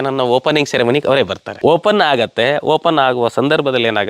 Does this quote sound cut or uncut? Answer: cut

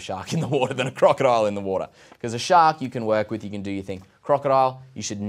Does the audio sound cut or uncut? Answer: uncut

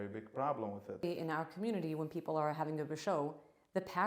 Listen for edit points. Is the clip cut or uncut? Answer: cut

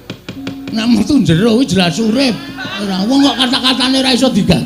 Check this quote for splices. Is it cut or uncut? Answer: cut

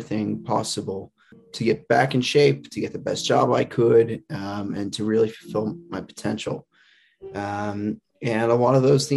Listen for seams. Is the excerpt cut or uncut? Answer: cut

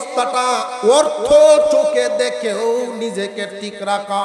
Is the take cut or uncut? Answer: uncut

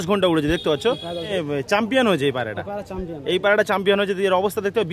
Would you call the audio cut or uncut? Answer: cut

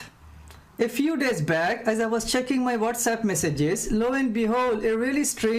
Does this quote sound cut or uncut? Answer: uncut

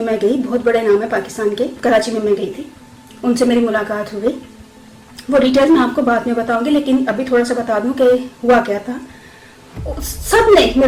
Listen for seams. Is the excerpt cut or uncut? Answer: uncut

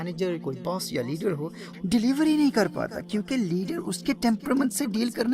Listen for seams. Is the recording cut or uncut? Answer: cut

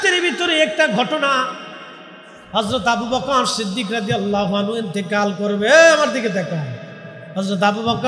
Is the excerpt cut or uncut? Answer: uncut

